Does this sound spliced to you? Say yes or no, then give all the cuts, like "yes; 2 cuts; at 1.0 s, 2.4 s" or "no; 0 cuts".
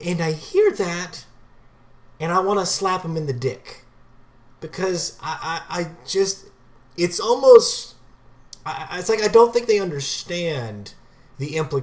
no; 0 cuts